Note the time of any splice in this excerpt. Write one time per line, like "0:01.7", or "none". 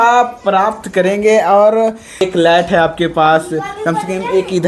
0:02.2